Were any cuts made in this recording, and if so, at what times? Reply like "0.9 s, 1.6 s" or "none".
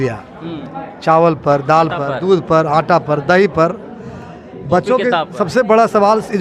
none